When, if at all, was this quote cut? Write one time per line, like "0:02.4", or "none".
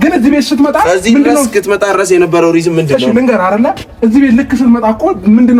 none